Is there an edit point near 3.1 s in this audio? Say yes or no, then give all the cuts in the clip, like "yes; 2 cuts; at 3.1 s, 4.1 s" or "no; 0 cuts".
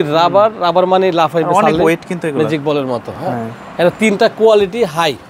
no; 0 cuts